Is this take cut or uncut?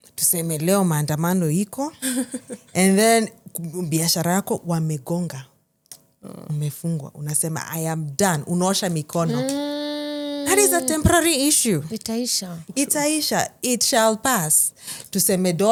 uncut